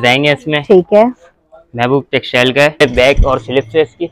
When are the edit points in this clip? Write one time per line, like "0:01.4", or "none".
0:02.8